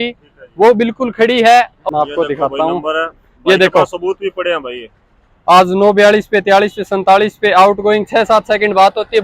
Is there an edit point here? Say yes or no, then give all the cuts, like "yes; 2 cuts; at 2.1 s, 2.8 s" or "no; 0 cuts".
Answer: yes; 1 cut; at 1.8 s